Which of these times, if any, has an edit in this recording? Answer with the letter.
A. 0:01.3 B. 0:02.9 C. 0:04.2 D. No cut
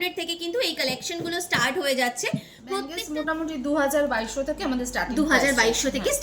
B